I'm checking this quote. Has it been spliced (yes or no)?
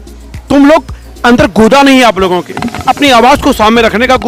no